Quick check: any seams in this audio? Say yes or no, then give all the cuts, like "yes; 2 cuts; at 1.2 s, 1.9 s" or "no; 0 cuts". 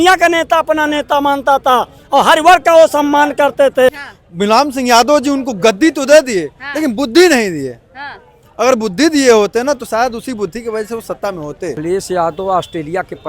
yes; 2 cuts; at 4.1 s, 11.8 s